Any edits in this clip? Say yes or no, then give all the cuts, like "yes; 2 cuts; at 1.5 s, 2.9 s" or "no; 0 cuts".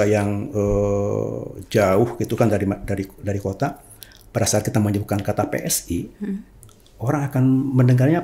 no; 0 cuts